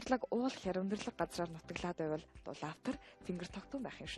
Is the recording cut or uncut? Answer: cut